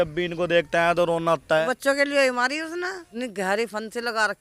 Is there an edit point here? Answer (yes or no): yes